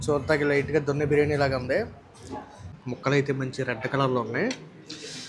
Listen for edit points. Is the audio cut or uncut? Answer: cut